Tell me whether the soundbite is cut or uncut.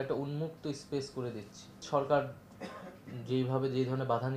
cut